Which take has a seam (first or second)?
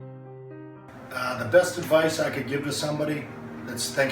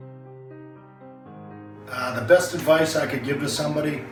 first